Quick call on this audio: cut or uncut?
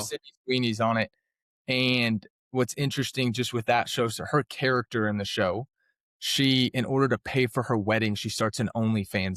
uncut